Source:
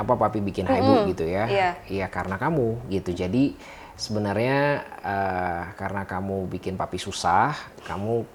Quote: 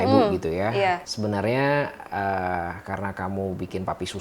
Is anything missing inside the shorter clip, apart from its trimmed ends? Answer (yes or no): yes